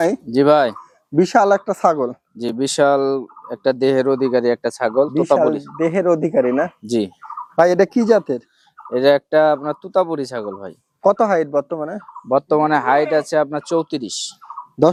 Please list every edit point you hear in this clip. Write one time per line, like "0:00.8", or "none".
none